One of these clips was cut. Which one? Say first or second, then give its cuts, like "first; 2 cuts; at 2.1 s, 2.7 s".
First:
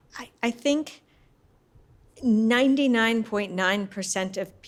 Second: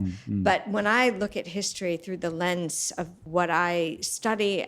second; 1 cut; at 3.2 s